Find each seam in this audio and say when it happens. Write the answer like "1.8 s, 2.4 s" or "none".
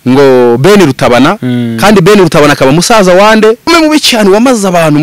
3.7 s